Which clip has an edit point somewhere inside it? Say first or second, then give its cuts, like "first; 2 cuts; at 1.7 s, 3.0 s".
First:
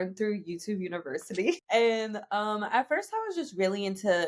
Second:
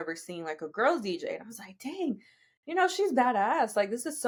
first; 1 cut; at 1.6 s